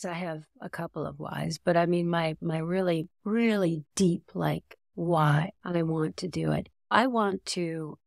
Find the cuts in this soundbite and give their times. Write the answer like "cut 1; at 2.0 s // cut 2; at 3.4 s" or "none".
cut 1; at 5.6 s // cut 2; at 6.9 s